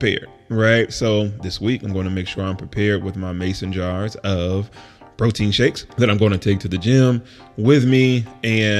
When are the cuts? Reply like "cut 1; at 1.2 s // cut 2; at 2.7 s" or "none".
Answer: cut 1; at 5.8 s